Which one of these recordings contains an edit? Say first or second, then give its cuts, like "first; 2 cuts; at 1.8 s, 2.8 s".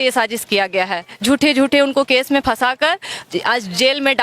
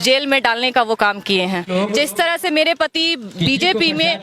second; 1 cut; at 1.7 s